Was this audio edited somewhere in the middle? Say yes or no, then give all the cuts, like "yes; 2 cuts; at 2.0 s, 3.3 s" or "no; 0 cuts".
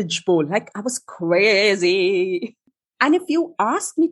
yes; 1 cut; at 2.5 s